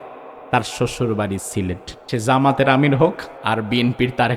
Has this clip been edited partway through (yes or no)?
yes